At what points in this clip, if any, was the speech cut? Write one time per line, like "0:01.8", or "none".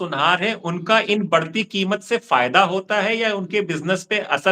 none